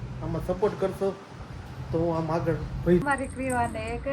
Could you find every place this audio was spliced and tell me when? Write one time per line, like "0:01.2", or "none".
0:03.0